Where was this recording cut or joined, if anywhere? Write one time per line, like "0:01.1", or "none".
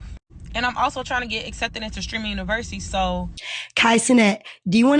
0:03.6